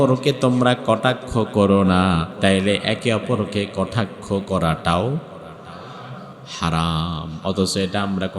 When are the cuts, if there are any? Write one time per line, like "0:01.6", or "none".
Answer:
0:02.3